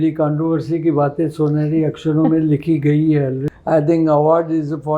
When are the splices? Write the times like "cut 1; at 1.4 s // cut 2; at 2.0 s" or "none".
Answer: cut 1; at 3.4 s